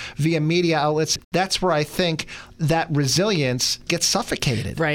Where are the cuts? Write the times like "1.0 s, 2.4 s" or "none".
1.1 s, 3.8 s